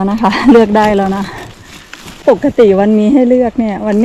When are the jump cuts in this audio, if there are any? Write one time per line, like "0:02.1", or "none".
0:02.2